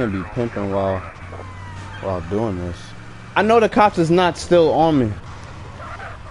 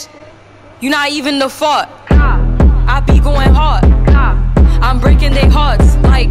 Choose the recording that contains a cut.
first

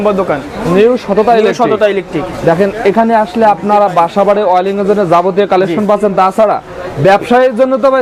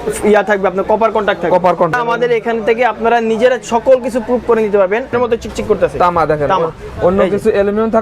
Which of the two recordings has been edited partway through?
second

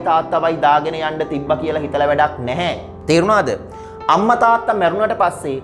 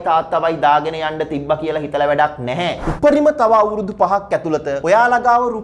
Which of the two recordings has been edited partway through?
second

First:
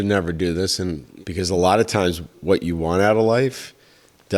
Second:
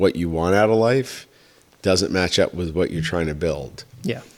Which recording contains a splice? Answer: first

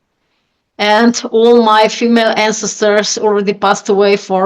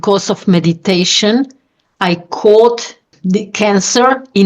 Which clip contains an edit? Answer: second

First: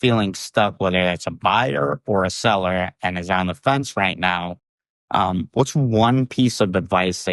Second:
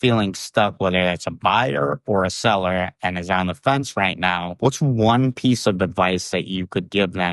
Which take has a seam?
second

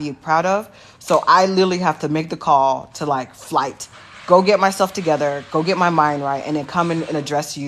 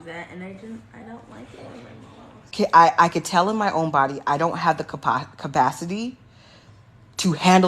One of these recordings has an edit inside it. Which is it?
second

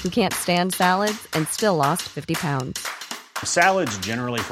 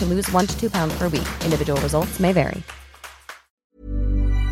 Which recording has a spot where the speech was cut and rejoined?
second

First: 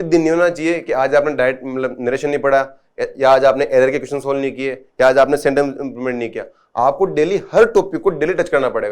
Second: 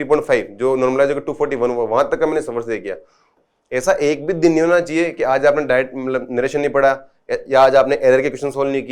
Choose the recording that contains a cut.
second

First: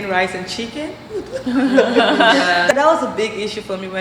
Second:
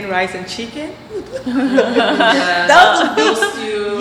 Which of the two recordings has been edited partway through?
first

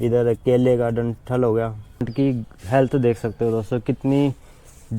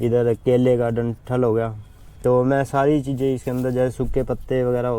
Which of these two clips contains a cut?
first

